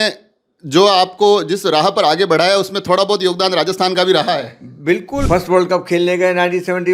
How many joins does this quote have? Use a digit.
1